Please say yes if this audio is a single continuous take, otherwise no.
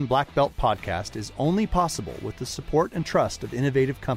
yes